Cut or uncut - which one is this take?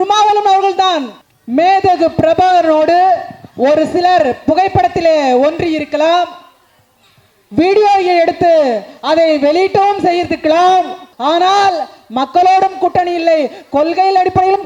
cut